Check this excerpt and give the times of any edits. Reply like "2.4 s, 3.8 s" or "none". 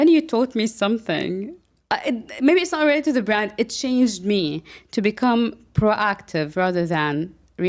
none